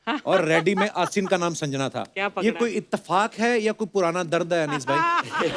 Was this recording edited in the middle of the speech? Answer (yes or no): no